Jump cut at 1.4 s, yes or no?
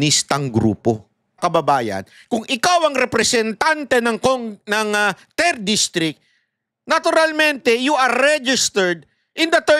yes